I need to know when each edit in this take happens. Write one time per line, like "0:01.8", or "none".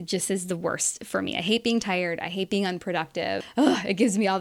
0:03.5